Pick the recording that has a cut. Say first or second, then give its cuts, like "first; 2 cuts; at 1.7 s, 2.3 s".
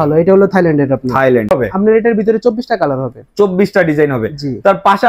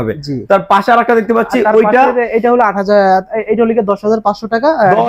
first; 1 cut; at 1.5 s